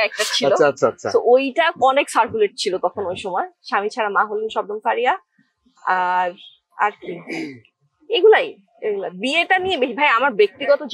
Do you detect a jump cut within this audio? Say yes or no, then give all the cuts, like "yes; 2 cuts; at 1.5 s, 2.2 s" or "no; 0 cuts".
no; 0 cuts